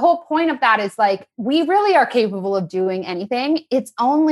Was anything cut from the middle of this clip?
yes; 1 cut; at 1.3 s

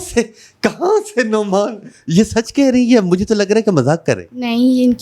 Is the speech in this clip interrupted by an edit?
no; 0 cuts

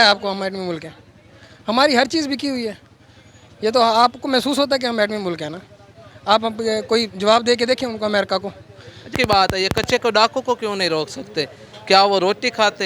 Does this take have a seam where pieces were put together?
yes; 1 cut; at 9.1 s

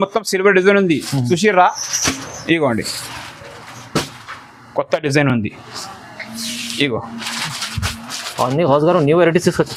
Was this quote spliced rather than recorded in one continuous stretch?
no; 0 cuts

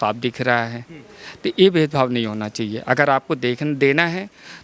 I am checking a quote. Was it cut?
no; 0 cuts

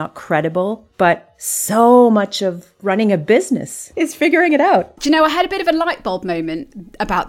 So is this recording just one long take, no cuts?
no; 4 cuts; at 0.9 s, 2.7 s, 3.8 s, 5.0 s

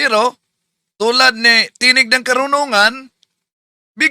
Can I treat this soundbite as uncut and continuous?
no; 1 cut; at 3.1 s

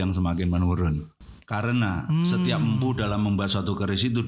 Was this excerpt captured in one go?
no; 1 cut; at 1.1 s

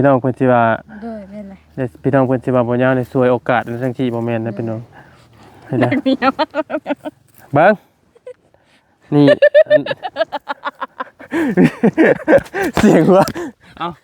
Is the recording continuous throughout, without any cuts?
yes; 0 cuts

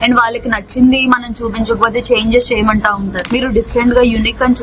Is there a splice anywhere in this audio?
yes; 1 cut; at 3.2 s

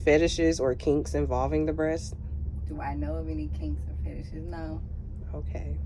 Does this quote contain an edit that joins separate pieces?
no; 0 cuts

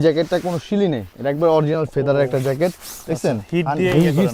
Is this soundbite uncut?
yes; 0 cuts

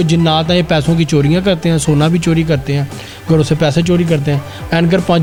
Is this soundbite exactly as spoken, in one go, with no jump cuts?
yes; 0 cuts

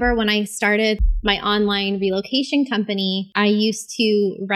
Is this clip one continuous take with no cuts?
no; 2 cuts; at 1.0 s, 3.2 s

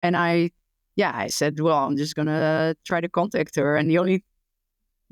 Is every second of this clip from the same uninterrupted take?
yes; 0 cuts

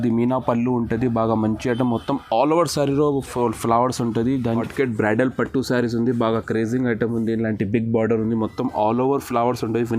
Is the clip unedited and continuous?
no; 1 cut; at 4.7 s

